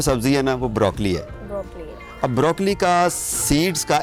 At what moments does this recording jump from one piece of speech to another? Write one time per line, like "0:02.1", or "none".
none